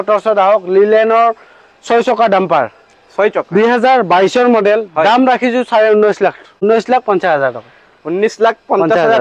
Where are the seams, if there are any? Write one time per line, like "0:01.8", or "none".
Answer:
none